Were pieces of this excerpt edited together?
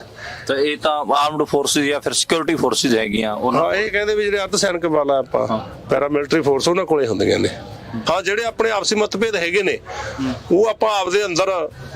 yes; 1 cut; at 8.0 s

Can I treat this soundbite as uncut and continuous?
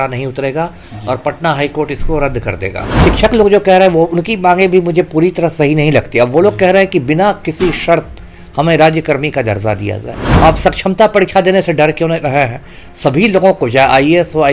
no; 2 cuts; at 3.0 s, 10.2 s

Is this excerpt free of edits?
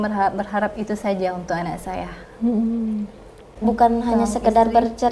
no; 1 cut; at 3.5 s

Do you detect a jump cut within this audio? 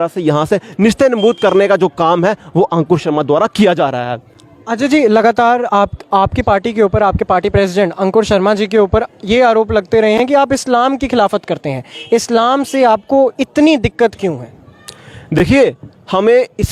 no; 0 cuts

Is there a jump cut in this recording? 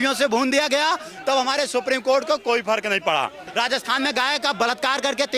yes; 1 cut; at 3.4 s

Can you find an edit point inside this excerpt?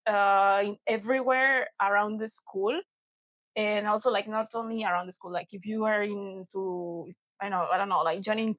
no; 0 cuts

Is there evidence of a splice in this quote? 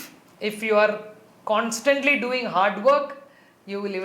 no; 0 cuts

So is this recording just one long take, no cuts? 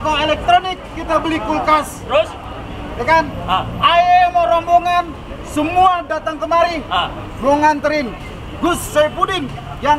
yes; 0 cuts

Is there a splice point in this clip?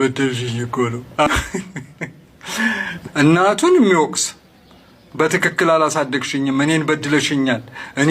yes; 2 cuts; at 1.3 s, 2.9 s

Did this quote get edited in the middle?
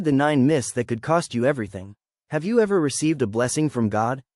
yes; 1 cut; at 2.1 s

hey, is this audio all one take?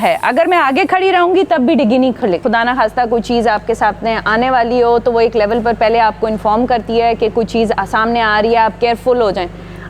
no; 1 cut; at 2.4 s

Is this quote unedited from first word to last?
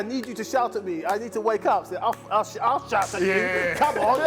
yes; 0 cuts

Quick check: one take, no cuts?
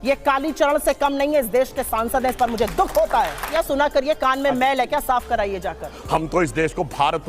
no; 2 cuts; at 3.5 s, 6.0 s

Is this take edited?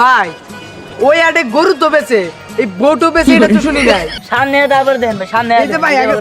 yes; 1 cut; at 4.2 s

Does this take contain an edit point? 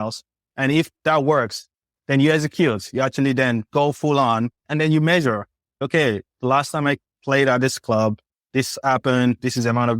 yes; 3 cuts; at 0.9 s, 1.9 s, 4.6 s

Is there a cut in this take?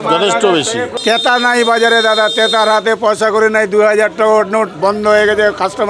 yes; 1 cut; at 0.9 s

